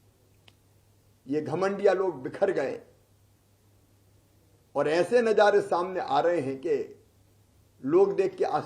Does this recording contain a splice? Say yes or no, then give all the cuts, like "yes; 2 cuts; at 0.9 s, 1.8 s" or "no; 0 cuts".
no; 0 cuts